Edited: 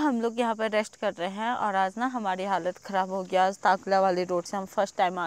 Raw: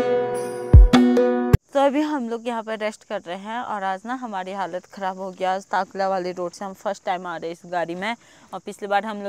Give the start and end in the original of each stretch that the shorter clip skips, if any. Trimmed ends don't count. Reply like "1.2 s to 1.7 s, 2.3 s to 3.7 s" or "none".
none